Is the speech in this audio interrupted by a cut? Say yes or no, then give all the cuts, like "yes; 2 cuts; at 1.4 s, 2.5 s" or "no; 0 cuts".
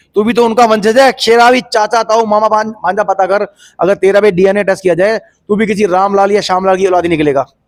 no; 0 cuts